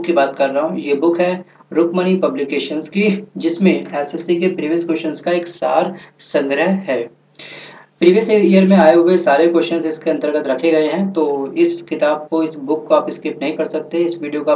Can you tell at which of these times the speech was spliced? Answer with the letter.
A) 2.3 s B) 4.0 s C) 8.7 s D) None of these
A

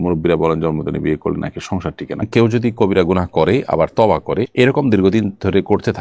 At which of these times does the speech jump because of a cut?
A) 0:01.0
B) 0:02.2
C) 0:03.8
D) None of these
B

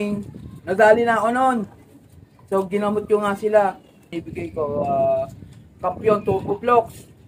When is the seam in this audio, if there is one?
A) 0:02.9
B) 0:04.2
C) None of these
B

